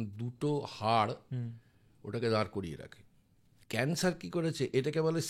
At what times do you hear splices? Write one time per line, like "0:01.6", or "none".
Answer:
0:03.5

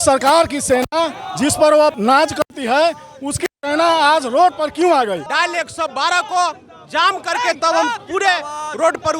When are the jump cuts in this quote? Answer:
0:02.0
0:05.3

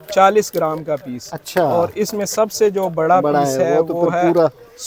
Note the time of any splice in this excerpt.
none

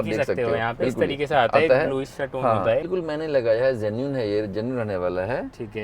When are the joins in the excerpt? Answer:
0:02.9

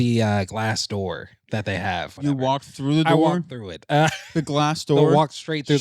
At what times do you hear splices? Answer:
0:02.1

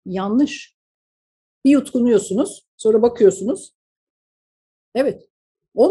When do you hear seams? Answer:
none

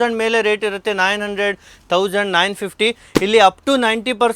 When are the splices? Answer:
none

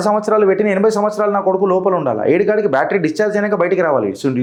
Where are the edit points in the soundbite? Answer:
none

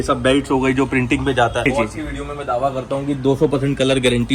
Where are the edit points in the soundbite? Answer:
0:01.7

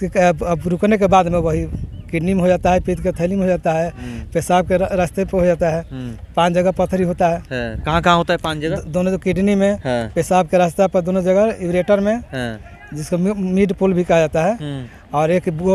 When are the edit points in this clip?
none

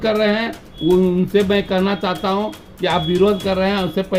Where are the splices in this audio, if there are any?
none

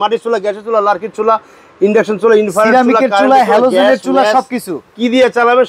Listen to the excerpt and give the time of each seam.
none

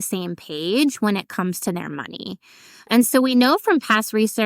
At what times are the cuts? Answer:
0:02.9

